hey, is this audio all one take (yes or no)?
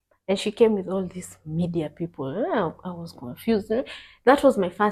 yes